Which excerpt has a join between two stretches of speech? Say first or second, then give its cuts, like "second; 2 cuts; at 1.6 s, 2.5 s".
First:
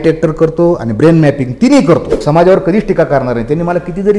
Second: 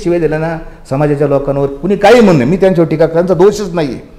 first; 1 cut; at 2.2 s